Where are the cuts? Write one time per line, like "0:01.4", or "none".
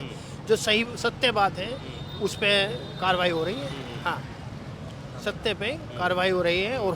none